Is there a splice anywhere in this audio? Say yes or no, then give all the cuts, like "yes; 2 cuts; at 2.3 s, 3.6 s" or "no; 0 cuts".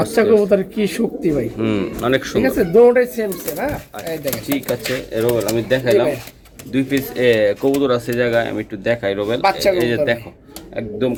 no; 0 cuts